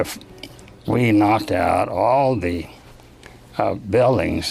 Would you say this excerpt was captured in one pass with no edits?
no; 1 cut; at 2.8 s

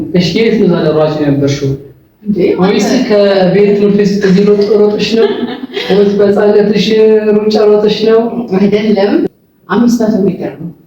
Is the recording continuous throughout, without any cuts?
no; 1 cut; at 9.2 s

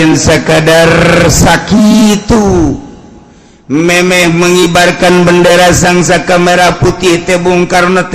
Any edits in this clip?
no; 0 cuts

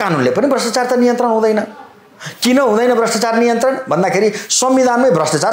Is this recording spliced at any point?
no; 0 cuts

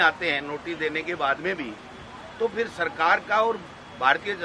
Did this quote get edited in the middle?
no; 0 cuts

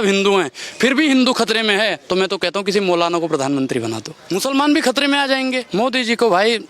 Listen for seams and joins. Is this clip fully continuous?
no; 2 cuts; at 4.1 s, 5.6 s

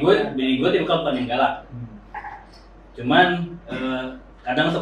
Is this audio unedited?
yes; 0 cuts

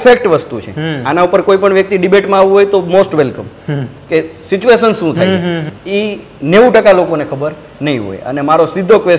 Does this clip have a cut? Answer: yes; 1 cut; at 5.7 s

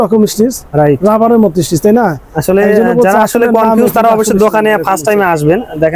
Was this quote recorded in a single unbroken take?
yes; 0 cuts

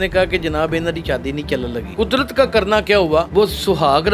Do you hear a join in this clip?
yes; 2 cuts; at 1.8 s, 3.3 s

